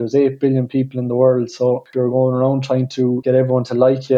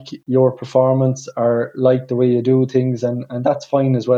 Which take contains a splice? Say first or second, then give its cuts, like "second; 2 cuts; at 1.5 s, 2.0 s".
first; 2 cuts; at 1.9 s, 3.2 s